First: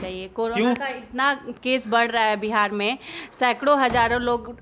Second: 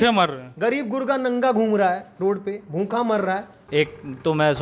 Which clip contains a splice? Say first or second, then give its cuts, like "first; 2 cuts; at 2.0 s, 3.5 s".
second; 1 cut; at 3.5 s